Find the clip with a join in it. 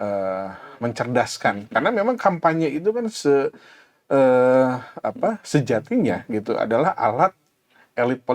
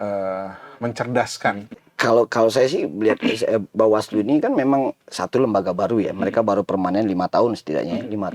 second; 1 cut; at 1.7 s

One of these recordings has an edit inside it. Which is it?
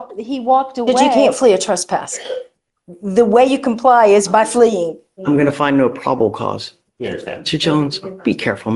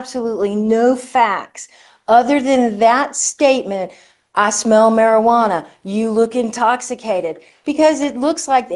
first; 2 cuts; at 1.2 s, 5.1 s

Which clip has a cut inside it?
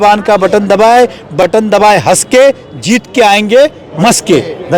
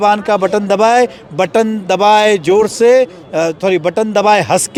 first; 1 cut; at 1.4 s

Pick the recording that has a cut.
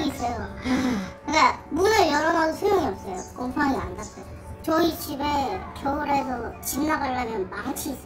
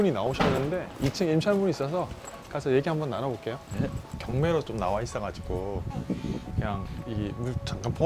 second; 1 cut; at 4.1 s

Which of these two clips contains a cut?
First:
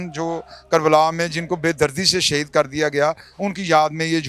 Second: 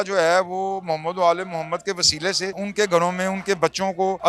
second; 1 cut; at 2.6 s

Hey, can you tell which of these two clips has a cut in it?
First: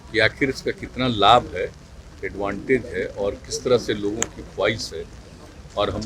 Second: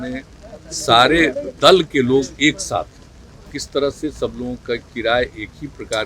second; 1 cut; at 3.5 s

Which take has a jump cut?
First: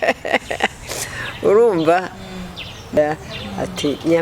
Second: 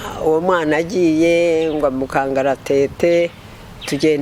first; 1 cut; at 3.0 s

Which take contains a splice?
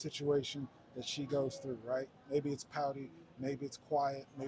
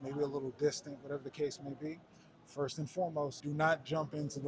second; 1 cut; at 3.4 s

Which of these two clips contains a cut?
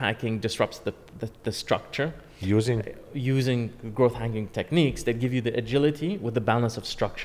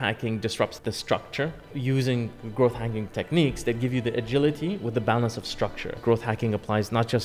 second; 3 cuts; at 0.8 s, 1.7 s, 5.9 s

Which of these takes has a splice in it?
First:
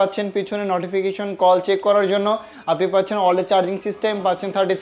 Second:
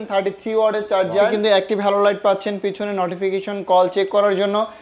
second; 1 cut; at 1.3 s

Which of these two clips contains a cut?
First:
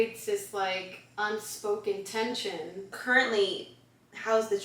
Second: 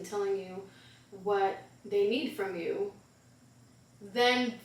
first; 1 cut; at 3.0 s

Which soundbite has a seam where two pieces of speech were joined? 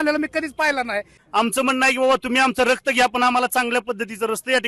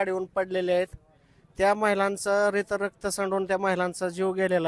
first; 1 cut; at 1.2 s

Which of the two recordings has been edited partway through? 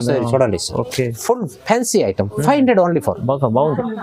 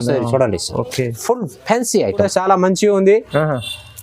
second; 1 cut; at 2.2 s

